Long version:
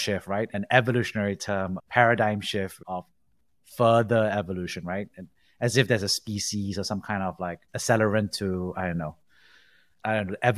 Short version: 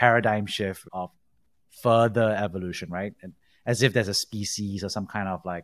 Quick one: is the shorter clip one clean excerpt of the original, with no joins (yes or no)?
yes